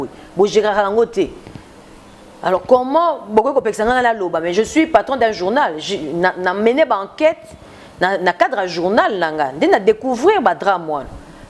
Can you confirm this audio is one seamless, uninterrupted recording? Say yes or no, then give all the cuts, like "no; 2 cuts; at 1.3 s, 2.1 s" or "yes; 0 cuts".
yes; 0 cuts